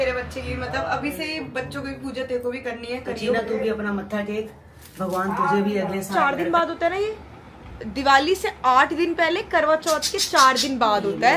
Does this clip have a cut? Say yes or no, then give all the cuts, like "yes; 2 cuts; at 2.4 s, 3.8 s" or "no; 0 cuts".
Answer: yes; 2 cuts; at 3.3 s, 6.1 s